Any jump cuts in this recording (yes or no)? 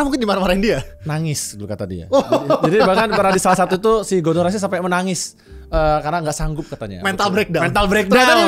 no